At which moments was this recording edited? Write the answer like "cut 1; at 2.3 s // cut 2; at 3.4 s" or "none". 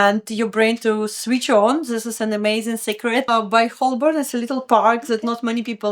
cut 1; at 3.3 s